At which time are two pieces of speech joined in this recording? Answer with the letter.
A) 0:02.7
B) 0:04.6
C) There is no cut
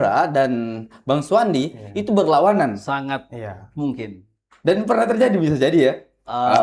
C